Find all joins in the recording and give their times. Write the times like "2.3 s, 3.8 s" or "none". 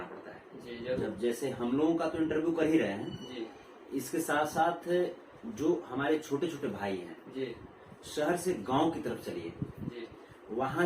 1.0 s